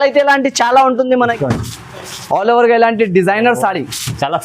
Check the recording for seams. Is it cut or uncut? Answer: cut